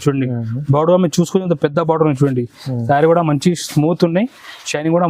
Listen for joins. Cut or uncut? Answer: uncut